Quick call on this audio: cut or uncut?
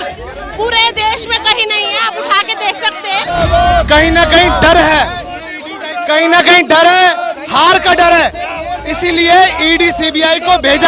cut